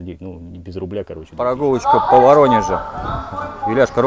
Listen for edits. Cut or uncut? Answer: cut